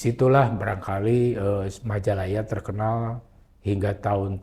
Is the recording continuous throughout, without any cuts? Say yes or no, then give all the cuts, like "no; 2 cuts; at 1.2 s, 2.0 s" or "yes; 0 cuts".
yes; 0 cuts